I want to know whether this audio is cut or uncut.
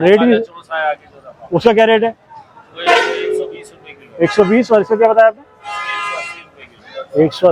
uncut